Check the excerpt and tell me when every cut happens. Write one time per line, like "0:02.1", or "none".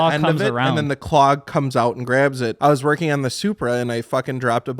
0:02.5